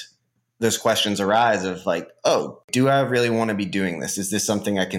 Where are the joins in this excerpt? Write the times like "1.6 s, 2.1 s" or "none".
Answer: 2.6 s